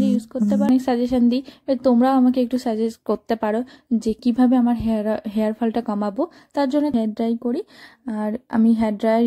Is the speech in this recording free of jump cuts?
no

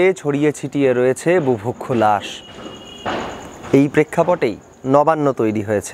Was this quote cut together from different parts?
no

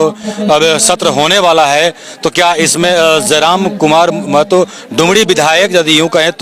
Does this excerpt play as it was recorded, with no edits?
yes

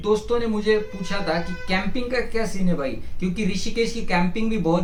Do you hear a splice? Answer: no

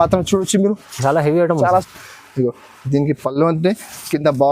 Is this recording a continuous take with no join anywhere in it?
no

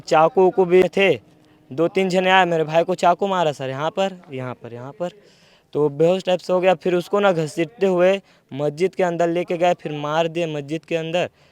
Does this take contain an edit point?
no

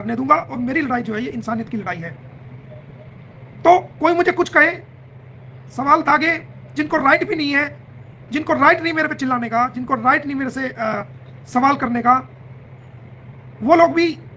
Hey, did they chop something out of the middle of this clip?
no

